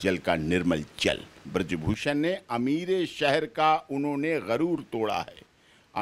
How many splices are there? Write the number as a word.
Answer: one